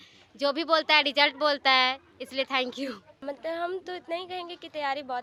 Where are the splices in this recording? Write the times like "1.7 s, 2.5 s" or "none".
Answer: none